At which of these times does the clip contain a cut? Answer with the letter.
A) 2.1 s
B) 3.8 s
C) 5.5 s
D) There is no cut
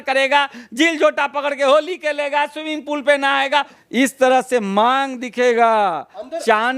B